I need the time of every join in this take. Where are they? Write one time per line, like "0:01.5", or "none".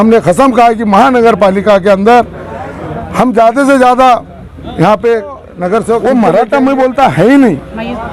0:06.0